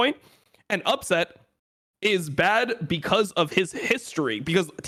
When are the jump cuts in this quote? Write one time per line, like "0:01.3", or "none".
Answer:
none